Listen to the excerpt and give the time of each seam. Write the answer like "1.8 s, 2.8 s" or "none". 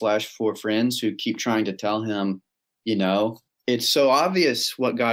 3.5 s